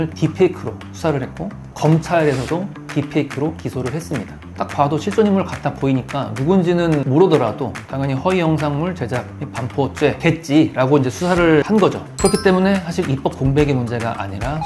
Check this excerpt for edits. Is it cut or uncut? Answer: cut